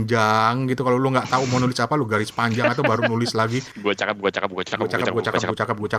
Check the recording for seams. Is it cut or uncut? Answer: uncut